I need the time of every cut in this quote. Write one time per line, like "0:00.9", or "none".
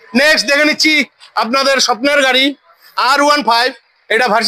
none